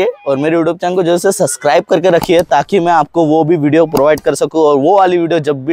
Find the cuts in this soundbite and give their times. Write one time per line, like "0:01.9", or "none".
none